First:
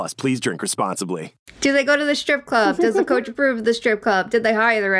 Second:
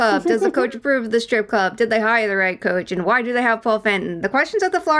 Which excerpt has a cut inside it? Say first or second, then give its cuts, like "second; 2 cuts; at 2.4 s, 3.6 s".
first; 1 cut; at 1.6 s